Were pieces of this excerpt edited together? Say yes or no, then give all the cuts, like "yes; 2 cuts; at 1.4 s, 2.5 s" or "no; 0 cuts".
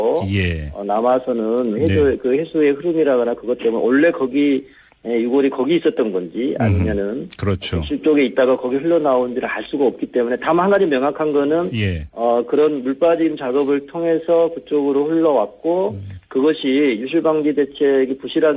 yes; 1 cut; at 3.4 s